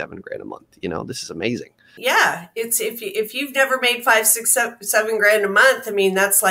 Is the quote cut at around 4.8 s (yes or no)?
no